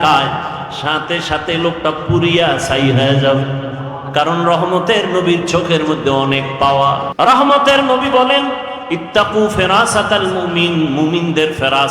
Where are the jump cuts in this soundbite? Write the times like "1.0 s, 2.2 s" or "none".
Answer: 7.1 s